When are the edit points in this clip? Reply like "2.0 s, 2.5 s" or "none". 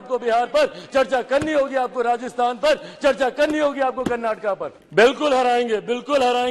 4.8 s